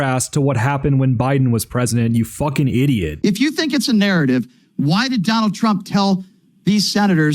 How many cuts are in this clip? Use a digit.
1